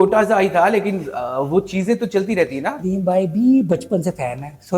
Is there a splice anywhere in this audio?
yes; 1 cut; at 2.7 s

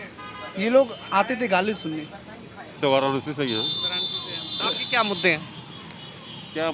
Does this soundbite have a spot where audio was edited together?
yes; 1 cut; at 2.7 s

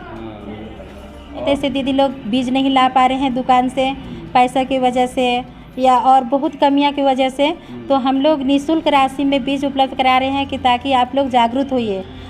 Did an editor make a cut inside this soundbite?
yes; 1 cut; at 1.4 s

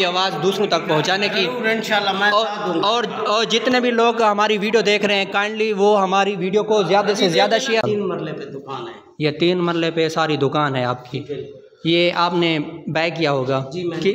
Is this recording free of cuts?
no; 1 cut; at 7.8 s

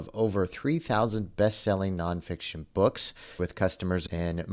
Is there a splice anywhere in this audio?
yes; 1 cut; at 3.5 s

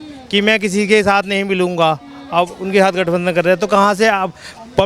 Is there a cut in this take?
no; 0 cuts

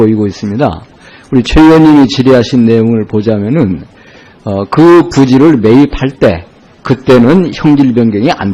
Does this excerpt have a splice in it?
yes; 1 cut; at 2.1 s

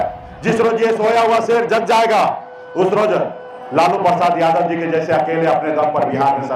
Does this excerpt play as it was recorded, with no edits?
yes; 0 cuts

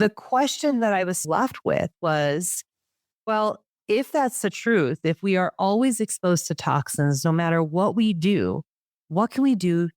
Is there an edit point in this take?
yes; 1 cut; at 1.2 s

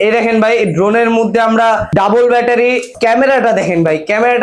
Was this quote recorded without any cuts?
no; 2 cuts; at 1.9 s, 2.9 s

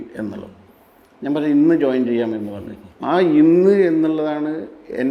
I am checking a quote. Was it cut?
no; 0 cuts

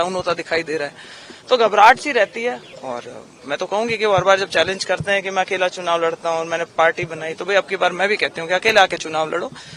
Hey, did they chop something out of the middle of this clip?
yes; 1 cut; at 2.7 s

